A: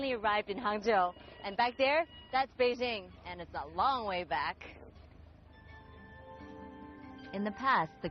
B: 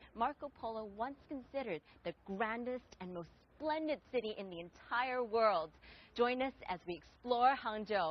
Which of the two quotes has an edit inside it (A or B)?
A